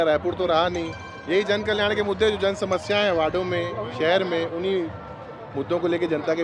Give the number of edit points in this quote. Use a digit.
0